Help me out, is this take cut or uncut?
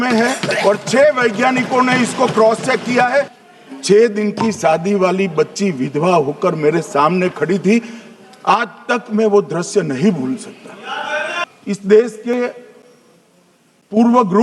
cut